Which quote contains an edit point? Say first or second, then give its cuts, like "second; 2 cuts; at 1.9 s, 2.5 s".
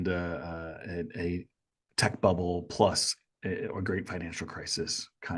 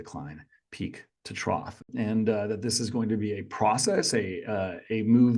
second; 1 cut; at 1.9 s